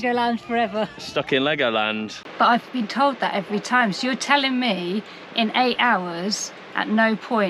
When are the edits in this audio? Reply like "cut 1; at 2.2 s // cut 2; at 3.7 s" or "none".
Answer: cut 1; at 2.2 s